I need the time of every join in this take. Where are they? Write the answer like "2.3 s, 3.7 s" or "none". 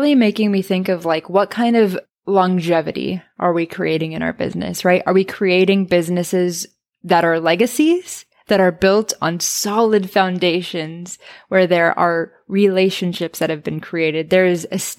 2.1 s